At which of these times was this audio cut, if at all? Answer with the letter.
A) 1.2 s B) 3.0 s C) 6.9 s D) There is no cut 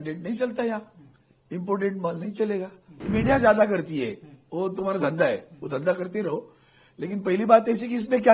B